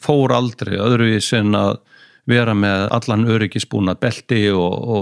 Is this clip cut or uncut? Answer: cut